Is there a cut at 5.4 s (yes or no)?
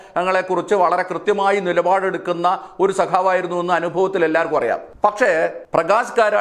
yes